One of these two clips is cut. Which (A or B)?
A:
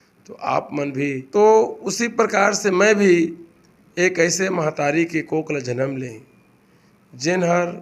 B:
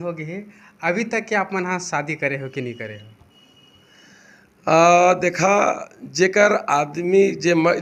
A